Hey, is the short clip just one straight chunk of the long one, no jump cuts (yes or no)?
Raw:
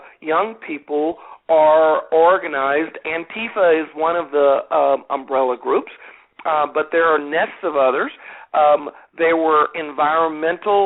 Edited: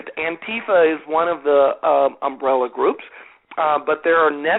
yes